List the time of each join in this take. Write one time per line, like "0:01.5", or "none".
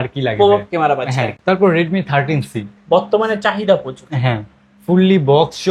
0:01.4